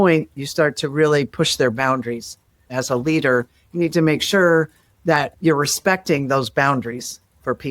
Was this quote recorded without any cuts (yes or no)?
no